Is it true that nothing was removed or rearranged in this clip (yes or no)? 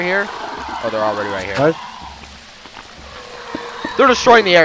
yes